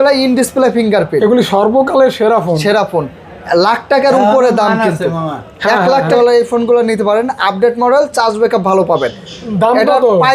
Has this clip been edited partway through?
yes; 1 cut; at 6.1 s

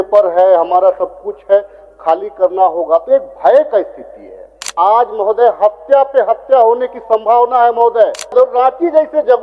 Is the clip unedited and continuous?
no; 2 cuts; at 4.7 s, 8.3 s

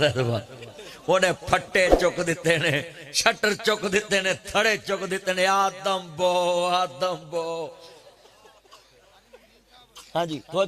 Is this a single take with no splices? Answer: yes; 0 cuts

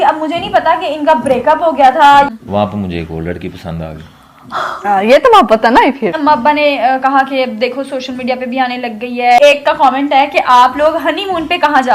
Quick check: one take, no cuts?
no; 3 cuts; at 2.3 s, 6.2 s, 9.4 s

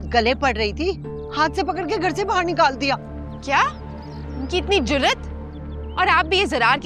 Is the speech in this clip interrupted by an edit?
no; 0 cuts

